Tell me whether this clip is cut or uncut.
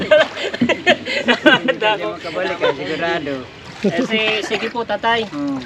cut